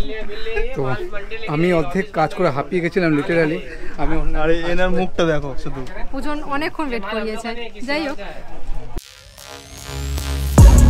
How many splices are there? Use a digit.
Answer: 1